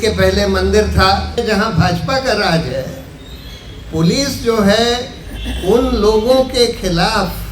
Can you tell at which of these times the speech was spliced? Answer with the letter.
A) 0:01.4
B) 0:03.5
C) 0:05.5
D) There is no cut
A